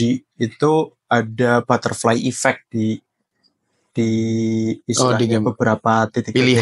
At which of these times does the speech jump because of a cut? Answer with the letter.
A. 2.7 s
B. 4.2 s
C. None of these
C